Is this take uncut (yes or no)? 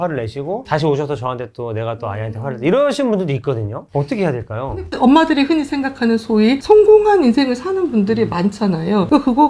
no